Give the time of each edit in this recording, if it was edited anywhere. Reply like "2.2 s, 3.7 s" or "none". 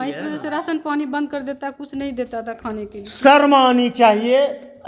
none